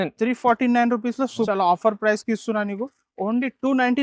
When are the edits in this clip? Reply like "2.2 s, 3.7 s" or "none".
1.5 s